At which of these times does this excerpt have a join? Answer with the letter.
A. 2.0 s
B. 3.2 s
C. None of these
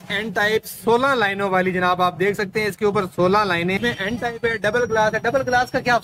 C